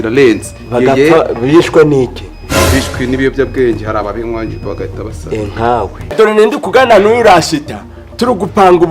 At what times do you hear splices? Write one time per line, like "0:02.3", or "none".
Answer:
0:06.1